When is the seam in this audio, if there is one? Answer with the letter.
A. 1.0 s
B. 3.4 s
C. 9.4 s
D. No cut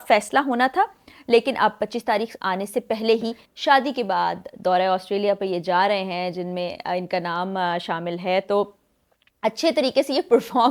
B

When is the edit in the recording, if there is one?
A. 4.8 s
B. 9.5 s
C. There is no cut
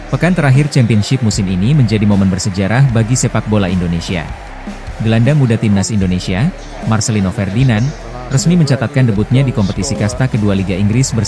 A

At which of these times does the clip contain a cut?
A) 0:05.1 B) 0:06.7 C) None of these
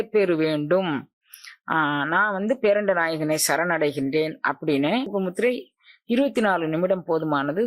A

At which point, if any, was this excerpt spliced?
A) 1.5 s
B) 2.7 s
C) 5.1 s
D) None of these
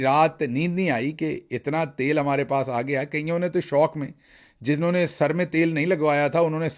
D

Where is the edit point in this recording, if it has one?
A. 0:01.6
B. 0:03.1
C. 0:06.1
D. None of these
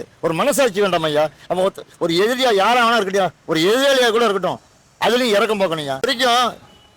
C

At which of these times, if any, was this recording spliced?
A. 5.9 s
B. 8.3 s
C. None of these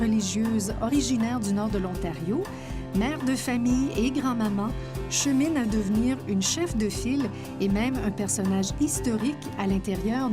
A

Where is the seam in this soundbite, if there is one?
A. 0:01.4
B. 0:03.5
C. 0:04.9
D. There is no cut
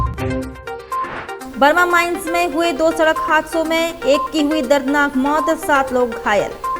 A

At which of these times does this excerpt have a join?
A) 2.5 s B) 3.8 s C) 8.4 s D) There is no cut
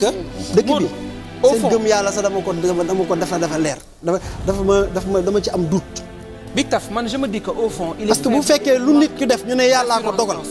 D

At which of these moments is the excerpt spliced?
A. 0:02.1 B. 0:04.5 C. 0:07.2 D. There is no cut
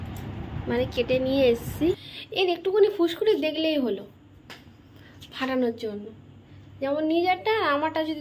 A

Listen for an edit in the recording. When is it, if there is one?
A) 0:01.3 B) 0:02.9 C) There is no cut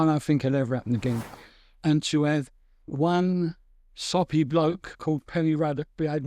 A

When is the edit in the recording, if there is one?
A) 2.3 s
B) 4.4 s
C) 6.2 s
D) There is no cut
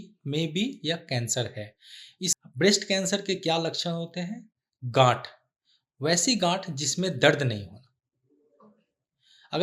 A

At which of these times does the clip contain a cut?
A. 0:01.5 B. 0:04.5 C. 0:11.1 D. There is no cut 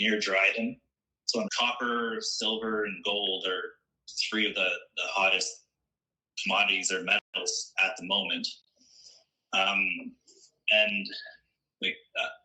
A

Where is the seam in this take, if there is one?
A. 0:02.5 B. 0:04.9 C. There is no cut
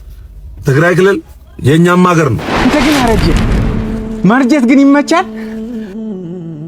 A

